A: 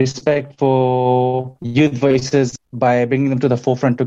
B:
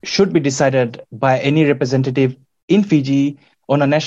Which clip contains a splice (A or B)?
A